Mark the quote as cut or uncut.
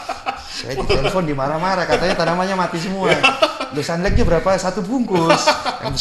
uncut